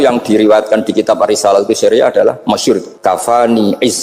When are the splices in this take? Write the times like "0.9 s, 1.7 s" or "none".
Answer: 2.9 s